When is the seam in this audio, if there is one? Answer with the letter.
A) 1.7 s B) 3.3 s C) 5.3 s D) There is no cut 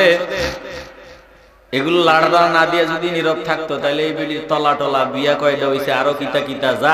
D